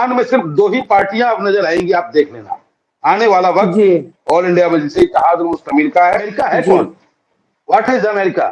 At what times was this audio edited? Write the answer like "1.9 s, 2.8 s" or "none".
6.3 s